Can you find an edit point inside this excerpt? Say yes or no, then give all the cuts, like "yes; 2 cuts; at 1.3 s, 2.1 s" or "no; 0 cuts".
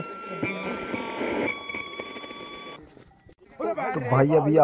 no; 0 cuts